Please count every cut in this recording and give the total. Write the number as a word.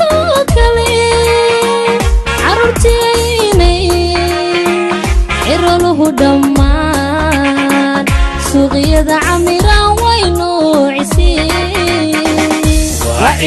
zero